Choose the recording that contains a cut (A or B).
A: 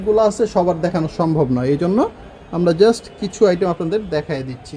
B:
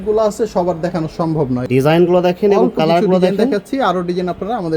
B